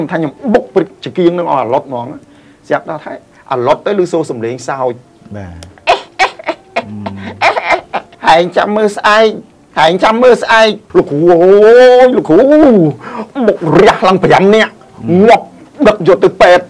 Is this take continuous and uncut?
no; 2 cuts; at 8.1 s, 10.8 s

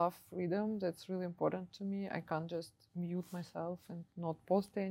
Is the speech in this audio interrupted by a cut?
no; 0 cuts

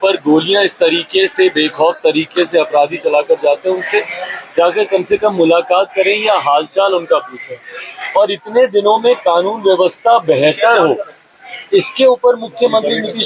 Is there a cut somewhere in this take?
no; 0 cuts

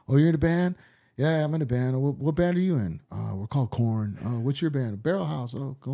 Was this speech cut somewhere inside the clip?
no; 0 cuts

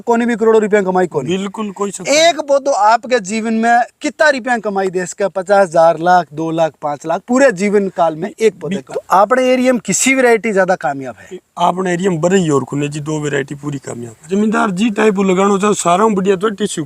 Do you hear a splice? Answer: yes; 2 cuts; at 8.8 s, 14.1 s

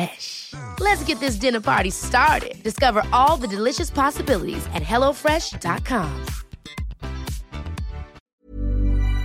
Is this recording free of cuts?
no; 1 cut; at 8.2 s

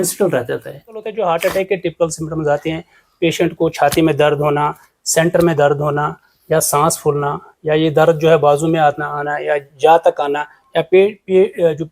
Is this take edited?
yes; 1 cut; at 1.0 s

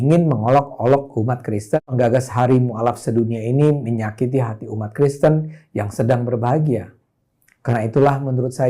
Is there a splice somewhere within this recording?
yes; 2 cuts; at 1.8 s, 3.2 s

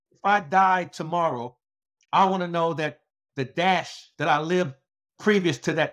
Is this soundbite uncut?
no; 1 cut; at 4.0 s

